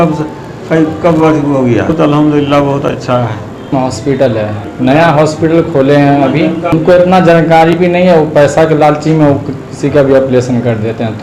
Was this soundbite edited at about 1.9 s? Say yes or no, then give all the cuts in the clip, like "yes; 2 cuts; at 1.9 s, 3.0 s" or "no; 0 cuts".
yes; 2 cuts; at 1.9 s, 3.7 s